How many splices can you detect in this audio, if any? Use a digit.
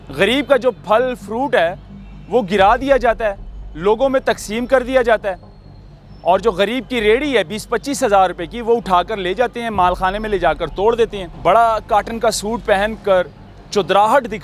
1